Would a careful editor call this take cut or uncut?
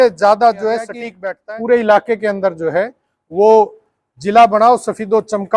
cut